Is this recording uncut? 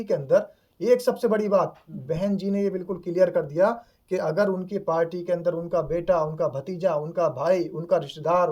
yes; 0 cuts

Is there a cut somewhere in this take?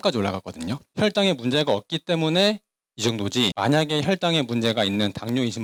no; 0 cuts

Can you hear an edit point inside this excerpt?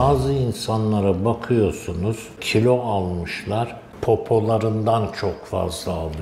yes; 2 cuts; at 2.4 s, 3.8 s

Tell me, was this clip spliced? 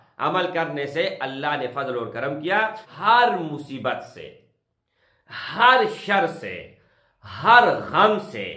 yes; 1 cut; at 2.9 s

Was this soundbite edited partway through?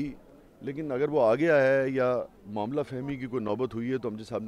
no; 0 cuts

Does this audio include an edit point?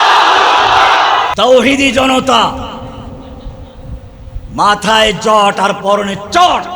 yes; 1 cut; at 1.3 s

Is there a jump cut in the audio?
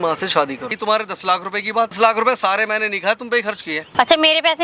yes; 3 cuts; at 0.8 s, 2.0 s, 3.9 s

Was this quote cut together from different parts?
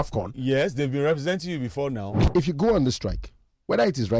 yes; 1 cut; at 2.2 s

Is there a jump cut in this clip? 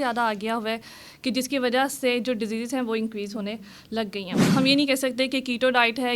yes; 1 cut; at 4.4 s

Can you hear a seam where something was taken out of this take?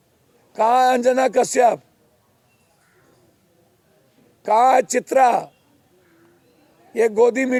no; 0 cuts

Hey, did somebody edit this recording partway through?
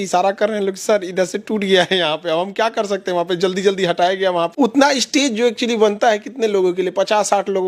yes; 1 cut; at 4.5 s

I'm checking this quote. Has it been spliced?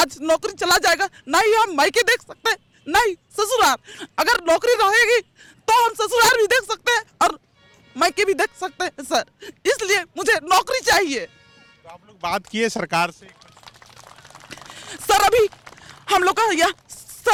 no; 0 cuts

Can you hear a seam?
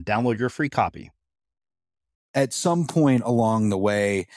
yes; 1 cut; at 2.2 s

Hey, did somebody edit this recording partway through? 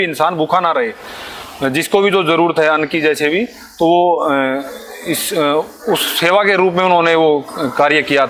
no; 0 cuts

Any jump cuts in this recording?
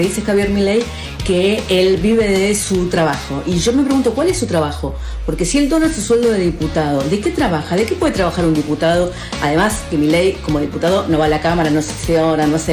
no; 0 cuts

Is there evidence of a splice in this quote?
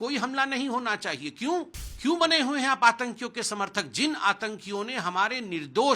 yes; 1 cut; at 1.8 s

